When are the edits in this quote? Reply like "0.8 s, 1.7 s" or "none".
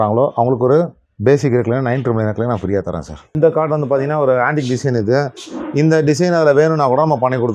3.3 s